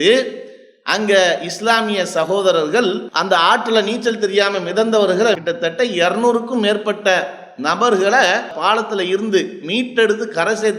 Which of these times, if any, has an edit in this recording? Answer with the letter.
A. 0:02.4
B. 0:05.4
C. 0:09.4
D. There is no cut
B